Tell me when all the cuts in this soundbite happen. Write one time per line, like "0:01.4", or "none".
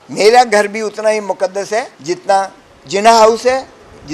0:01.9